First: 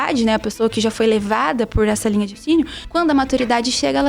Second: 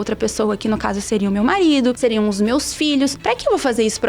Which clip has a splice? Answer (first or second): second